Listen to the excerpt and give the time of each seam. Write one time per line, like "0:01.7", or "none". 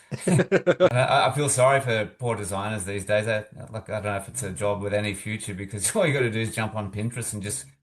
0:00.9